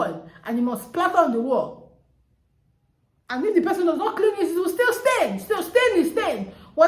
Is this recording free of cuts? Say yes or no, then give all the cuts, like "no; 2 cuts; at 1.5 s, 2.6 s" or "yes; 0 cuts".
yes; 0 cuts